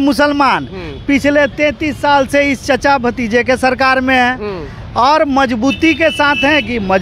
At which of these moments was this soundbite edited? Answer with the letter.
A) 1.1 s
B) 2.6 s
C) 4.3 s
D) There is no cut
D